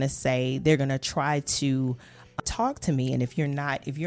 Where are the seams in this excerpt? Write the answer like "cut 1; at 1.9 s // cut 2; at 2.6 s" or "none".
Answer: cut 1; at 2.4 s